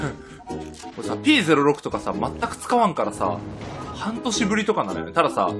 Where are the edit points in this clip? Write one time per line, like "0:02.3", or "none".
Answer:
0:01.4